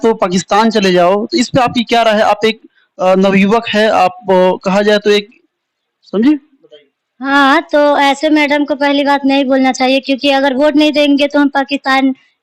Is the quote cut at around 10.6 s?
no; 0 cuts

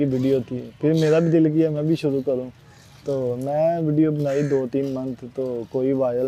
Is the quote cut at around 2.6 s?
no; 0 cuts

